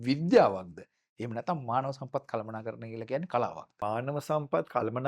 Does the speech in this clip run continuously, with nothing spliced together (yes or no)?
no